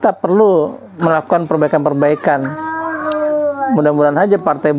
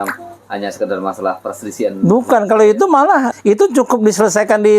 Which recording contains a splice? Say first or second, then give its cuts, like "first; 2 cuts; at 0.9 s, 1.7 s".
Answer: second; 1 cut; at 3.3 s